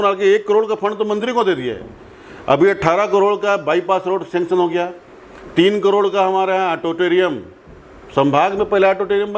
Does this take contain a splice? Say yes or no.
no